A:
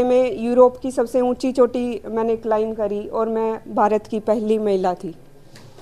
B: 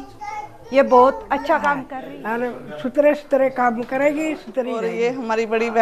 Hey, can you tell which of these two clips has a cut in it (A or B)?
B